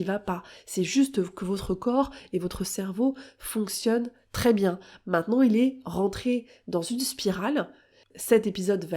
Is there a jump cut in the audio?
yes; 1 cut; at 8.1 s

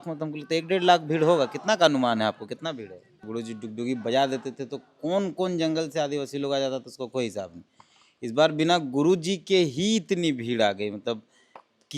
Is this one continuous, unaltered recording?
no; 1 cut; at 3.3 s

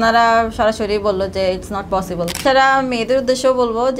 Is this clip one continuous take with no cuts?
no; 1 cut; at 2.4 s

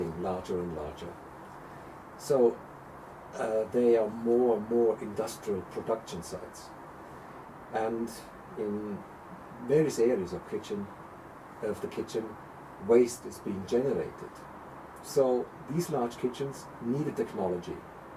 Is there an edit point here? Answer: no; 0 cuts

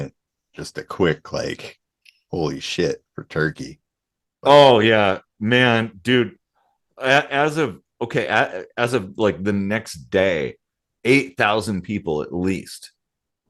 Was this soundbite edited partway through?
no; 0 cuts

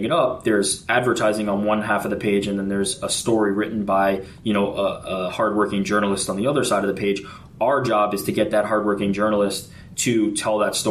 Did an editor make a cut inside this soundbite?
no; 0 cuts

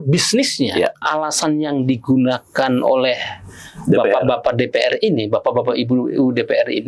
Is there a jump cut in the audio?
yes; 1 cut; at 1.0 s

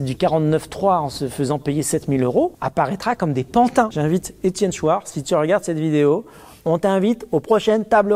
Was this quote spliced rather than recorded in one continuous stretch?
yes; 2 cuts; at 2.6 s, 3.9 s

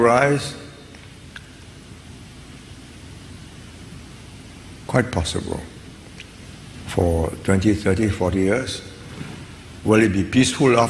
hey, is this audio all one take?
yes; 0 cuts

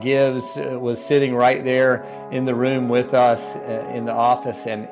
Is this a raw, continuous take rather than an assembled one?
yes; 0 cuts

